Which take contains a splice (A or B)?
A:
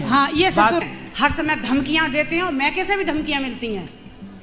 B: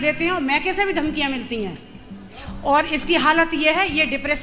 A